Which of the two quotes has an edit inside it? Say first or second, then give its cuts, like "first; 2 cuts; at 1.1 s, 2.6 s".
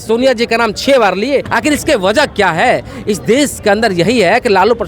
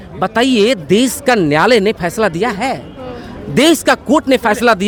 first; 1 cut; at 1.5 s